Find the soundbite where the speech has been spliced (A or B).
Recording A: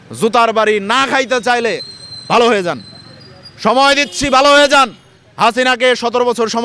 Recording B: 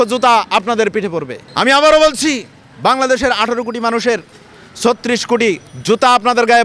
B